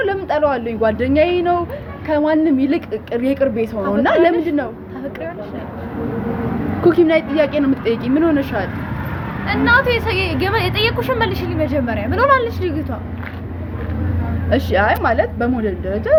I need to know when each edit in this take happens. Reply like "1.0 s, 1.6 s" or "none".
none